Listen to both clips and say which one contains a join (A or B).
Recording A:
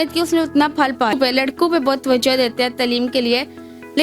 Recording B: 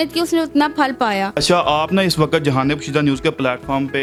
A